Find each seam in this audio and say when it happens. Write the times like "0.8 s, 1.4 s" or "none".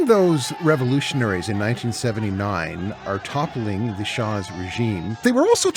none